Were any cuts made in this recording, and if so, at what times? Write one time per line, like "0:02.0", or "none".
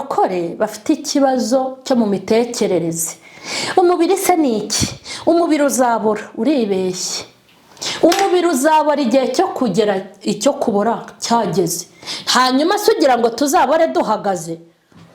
none